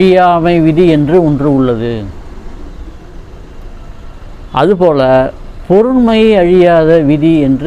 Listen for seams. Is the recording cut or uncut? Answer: uncut